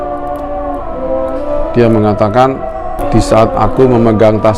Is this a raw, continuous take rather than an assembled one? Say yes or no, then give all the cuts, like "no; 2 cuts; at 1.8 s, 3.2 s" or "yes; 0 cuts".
no; 1 cut; at 3.0 s